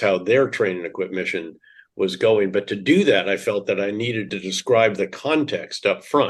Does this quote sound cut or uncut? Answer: cut